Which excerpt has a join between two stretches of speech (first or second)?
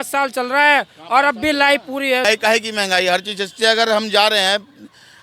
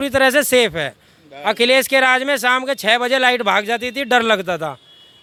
first